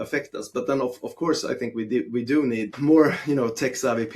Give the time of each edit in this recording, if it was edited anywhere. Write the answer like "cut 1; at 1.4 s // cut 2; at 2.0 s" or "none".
cut 1; at 2.7 s